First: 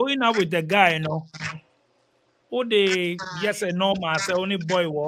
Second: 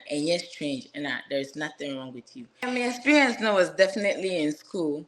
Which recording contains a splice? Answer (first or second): second